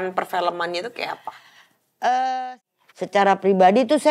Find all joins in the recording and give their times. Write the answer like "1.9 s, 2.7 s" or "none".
2.5 s